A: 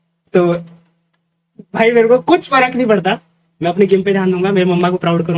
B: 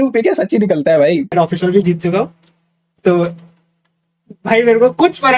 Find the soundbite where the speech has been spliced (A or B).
B